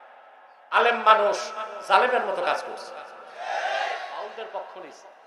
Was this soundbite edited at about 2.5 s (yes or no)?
no